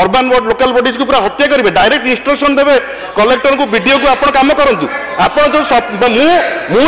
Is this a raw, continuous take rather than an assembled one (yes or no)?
yes